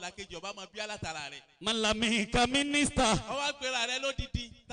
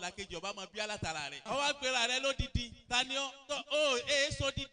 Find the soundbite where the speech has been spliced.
second; 1 cut; at 1.5 s

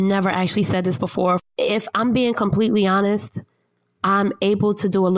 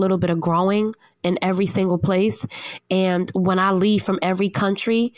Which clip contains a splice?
first; 1 cut; at 1.4 s

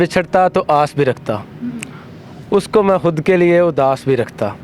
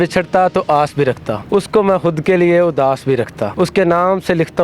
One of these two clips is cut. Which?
second; 2 cuts; at 1.3 s, 3.5 s

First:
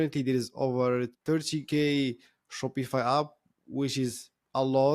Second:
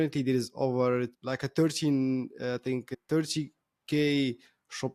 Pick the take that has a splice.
first; 1 cut; at 1.2 s

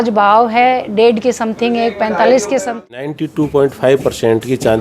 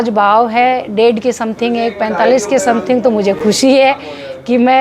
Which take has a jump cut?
first; 1 cut; at 3.1 s

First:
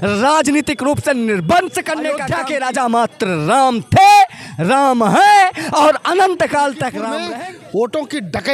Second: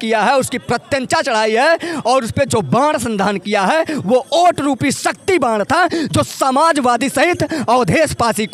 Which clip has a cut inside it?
first; 2 cuts; at 2.2 s, 7.1 s

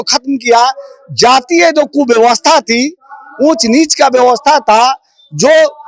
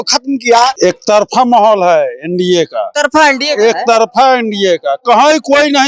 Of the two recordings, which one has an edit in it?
second; 2 cuts; at 0.7 s, 2.8 s

